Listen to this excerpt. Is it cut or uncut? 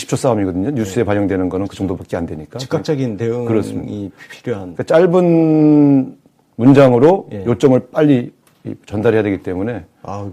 cut